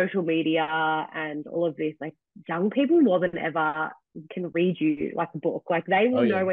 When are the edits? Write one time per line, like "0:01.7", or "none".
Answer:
none